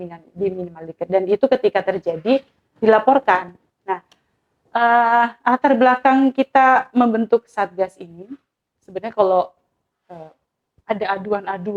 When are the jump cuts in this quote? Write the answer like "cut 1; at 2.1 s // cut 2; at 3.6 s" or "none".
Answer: none